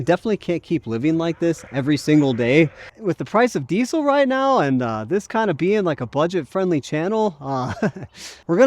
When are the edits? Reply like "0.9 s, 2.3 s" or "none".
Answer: 2.9 s